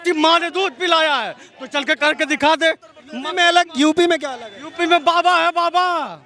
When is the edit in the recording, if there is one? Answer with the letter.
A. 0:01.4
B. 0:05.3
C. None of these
C